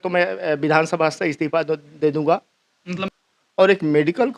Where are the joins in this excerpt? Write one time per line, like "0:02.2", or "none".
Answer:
0:03.0